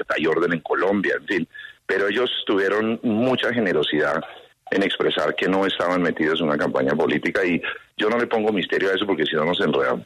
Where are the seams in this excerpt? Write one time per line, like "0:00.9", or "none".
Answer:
none